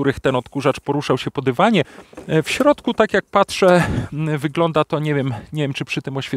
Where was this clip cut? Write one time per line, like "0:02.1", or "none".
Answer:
0:02.0